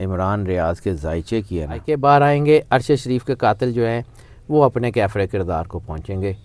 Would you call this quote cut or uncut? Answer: cut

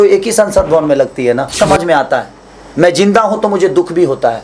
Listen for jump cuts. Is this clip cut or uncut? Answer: cut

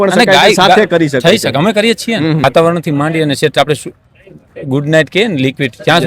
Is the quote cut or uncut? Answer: cut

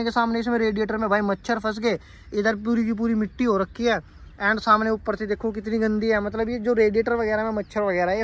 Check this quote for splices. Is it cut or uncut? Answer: uncut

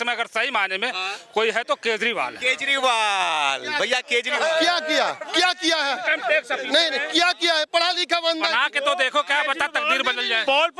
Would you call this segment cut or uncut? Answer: uncut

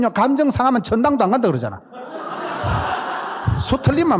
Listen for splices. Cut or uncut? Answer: uncut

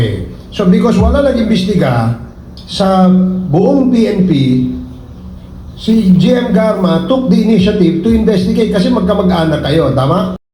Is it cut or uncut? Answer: uncut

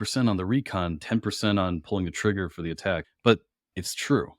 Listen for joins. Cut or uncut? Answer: cut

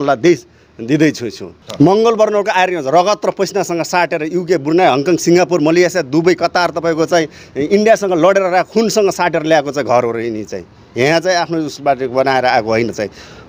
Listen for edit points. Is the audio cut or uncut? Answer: cut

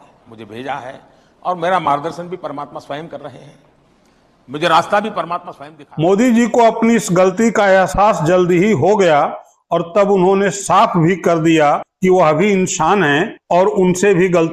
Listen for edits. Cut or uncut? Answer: uncut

